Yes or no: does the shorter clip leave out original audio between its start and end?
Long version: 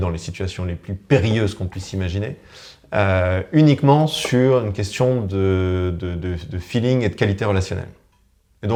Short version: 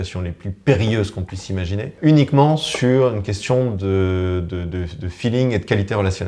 yes